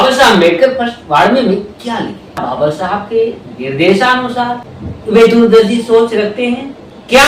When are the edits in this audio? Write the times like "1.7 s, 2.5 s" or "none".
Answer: 2.4 s